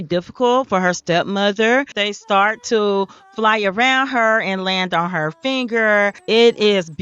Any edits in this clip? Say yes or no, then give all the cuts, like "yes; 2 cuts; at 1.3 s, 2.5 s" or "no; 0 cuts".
yes; 1 cut; at 1.9 s